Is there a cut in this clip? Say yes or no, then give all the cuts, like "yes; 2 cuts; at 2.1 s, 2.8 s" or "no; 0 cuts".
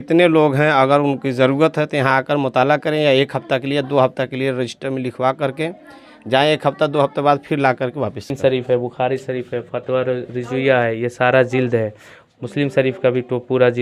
yes; 1 cut; at 8.4 s